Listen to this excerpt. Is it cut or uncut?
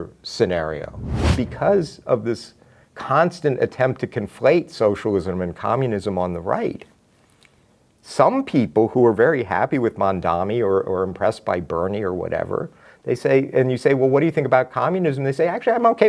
cut